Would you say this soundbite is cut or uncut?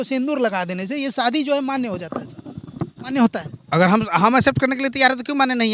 uncut